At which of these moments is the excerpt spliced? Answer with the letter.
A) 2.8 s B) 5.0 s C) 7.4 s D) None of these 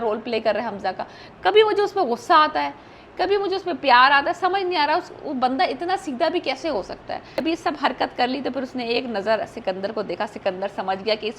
C